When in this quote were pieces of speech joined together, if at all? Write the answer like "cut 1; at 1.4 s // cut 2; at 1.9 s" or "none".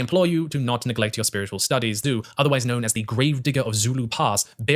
cut 1; at 2.0 s